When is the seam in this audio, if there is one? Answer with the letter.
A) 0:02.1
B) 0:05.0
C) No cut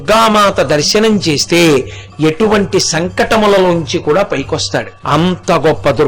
B